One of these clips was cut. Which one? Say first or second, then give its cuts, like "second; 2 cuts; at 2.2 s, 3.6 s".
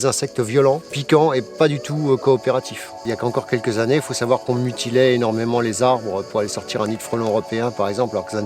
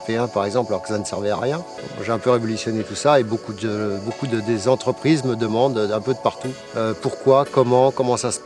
first; 1 cut; at 3.0 s